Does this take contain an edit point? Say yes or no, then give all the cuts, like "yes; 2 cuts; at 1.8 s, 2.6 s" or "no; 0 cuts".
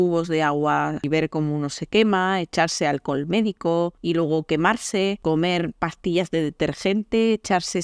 yes; 3 cuts; at 1.0 s, 4.0 s, 5.2 s